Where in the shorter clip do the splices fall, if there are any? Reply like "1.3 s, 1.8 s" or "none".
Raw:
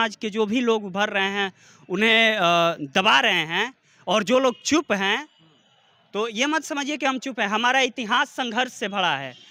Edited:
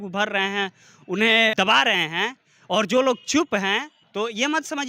1.5 s, 4.0 s